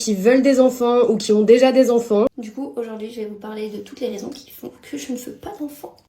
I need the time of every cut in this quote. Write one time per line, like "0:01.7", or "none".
0:02.3